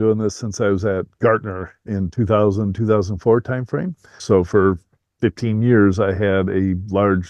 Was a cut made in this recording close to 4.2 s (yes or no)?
yes